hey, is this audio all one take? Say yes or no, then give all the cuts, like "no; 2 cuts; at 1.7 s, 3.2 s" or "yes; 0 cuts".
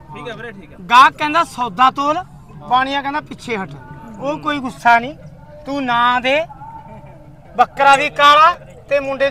yes; 0 cuts